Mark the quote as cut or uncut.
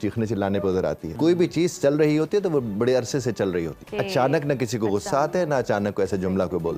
cut